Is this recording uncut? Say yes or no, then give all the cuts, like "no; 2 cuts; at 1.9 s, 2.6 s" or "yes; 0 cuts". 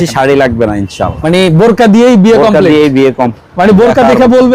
no; 1 cut; at 3.4 s